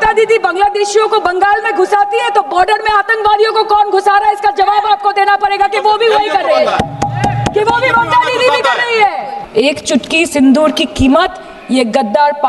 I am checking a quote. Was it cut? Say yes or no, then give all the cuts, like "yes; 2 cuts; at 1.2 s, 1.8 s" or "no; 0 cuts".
yes; 1 cut; at 9.4 s